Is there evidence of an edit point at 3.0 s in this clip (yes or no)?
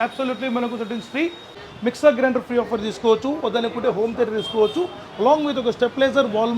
no